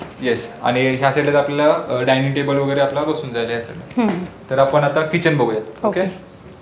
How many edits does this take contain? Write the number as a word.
zero